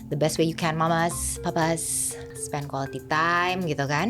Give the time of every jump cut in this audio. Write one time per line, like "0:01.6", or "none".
0:02.2